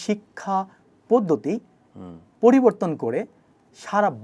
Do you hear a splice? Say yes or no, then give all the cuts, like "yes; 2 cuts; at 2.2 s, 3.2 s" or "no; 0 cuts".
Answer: no; 0 cuts